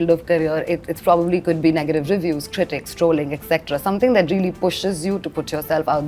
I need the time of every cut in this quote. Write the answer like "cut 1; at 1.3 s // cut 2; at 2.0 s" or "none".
none